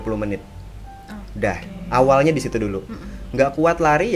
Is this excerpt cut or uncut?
uncut